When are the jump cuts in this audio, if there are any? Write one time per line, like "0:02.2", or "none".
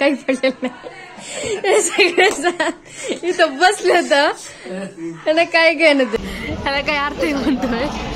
0:06.2